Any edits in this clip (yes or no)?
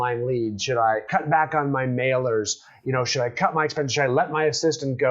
yes